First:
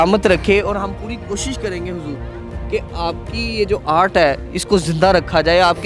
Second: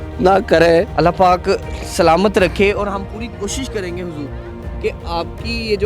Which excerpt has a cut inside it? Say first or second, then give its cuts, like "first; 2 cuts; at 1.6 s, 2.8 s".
second; 1 cut; at 0.9 s